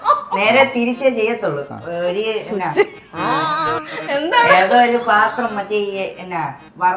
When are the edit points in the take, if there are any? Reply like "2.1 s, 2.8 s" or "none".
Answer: none